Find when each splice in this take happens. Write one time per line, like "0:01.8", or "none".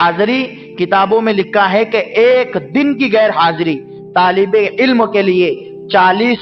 none